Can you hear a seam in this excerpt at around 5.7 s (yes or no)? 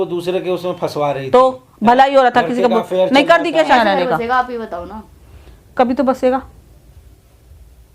no